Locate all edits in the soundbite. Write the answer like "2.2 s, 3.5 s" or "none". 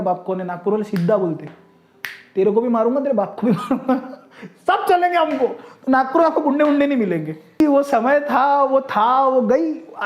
7.6 s